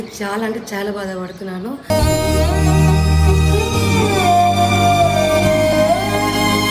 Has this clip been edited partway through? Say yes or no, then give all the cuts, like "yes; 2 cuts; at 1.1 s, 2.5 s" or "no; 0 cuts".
no; 0 cuts